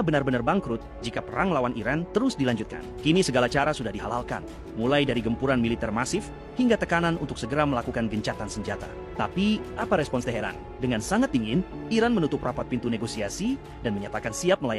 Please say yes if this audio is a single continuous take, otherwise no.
yes